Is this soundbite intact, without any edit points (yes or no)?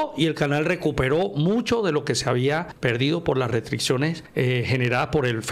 no